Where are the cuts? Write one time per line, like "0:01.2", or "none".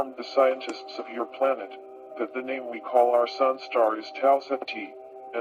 none

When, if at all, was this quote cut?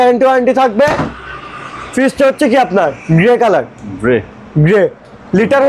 none

